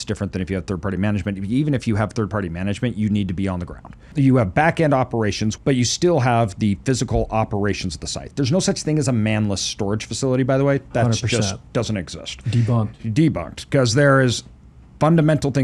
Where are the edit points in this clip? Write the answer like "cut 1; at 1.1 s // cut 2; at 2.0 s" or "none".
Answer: cut 1; at 4.1 s // cut 2; at 5.5 s